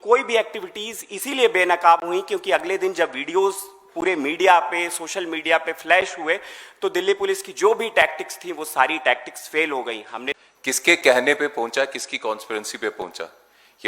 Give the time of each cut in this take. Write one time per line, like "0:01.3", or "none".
0:10.3